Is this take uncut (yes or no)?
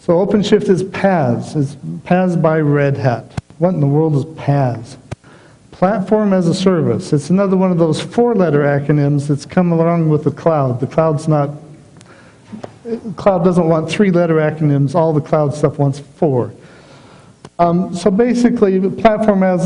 no